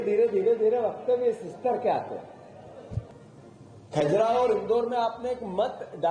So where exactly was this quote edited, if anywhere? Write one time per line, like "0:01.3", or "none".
0:03.1